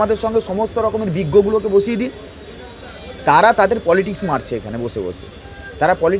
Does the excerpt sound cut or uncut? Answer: uncut